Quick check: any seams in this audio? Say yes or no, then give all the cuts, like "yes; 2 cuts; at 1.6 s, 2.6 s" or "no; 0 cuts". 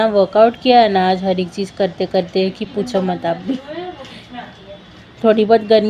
no; 0 cuts